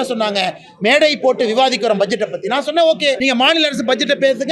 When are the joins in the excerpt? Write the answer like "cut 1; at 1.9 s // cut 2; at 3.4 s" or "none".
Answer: cut 1; at 3.2 s